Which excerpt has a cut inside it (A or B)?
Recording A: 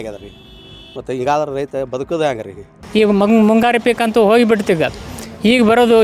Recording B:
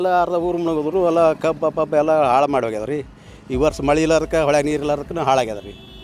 A